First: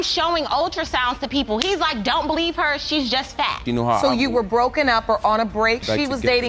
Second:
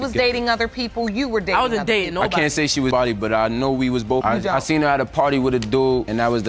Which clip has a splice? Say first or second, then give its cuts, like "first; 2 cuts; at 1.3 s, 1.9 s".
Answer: first; 1 cut; at 3.7 s